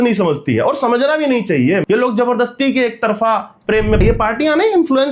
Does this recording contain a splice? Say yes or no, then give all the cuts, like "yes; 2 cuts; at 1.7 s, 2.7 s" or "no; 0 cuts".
yes; 2 cuts; at 1.8 s, 4.0 s